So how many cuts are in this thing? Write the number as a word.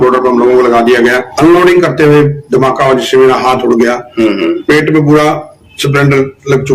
one